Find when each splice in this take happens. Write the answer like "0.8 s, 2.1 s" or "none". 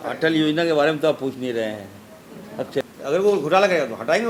2.8 s